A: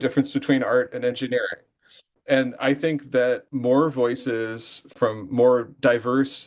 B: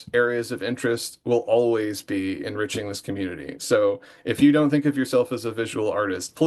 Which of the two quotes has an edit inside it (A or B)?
A